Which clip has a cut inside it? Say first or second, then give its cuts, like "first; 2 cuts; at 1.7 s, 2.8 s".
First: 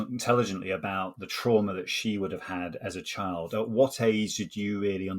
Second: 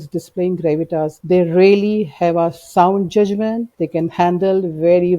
second; 2 cuts; at 1.2 s, 3.7 s